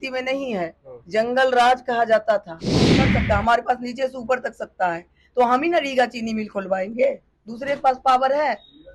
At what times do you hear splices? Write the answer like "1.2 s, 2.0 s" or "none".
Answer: 3.1 s